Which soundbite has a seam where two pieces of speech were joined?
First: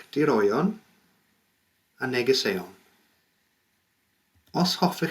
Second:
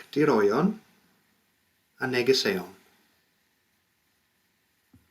first; 1 cut; at 4.0 s

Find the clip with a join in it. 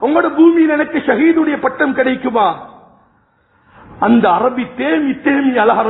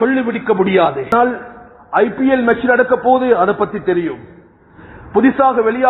second; 1 cut; at 1.1 s

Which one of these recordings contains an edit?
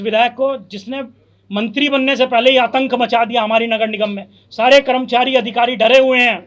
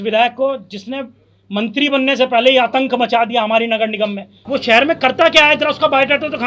second; 1 cut; at 4.3 s

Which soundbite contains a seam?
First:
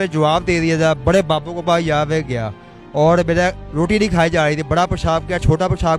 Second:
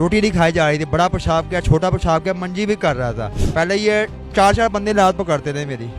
second; 1 cut; at 3.4 s

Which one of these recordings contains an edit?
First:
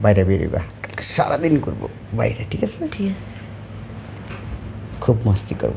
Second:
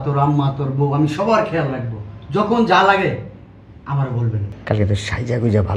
second; 1 cut; at 4.5 s

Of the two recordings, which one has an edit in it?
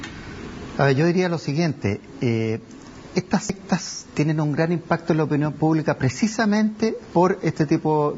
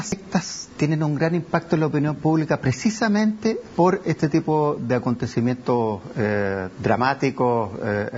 first; 1 cut; at 1.0 s

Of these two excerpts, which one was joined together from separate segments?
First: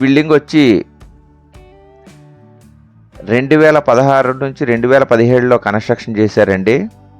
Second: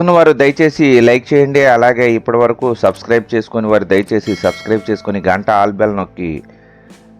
first; 2 cuts; at 0.9 s, 2.5 s

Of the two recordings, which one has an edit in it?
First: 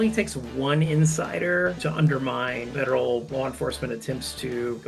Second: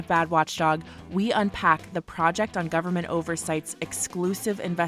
first; 1 cut; at 1.8 s

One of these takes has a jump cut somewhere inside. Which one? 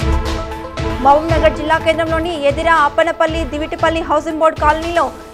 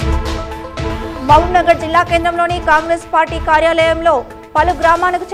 first; 1 cut; at 1.0 s

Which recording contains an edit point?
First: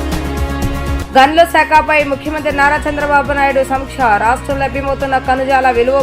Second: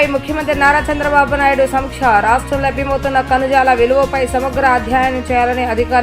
first; 1 cut; at 0.9 s

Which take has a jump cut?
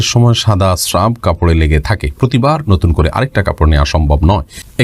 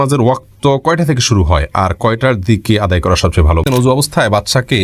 second; 1 cut; at 3.7 s

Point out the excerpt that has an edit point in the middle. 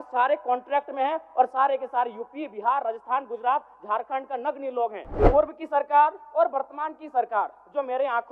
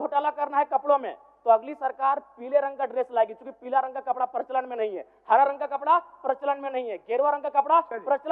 first; 1 cut; at 5.1 s

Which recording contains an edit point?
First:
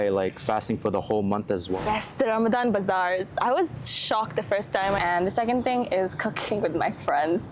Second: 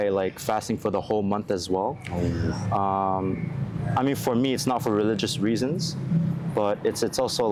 first; 2 cuts; at 1.8 s, 5.0 s

